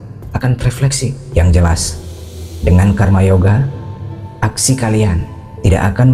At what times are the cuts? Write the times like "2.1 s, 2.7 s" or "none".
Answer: 1.2 s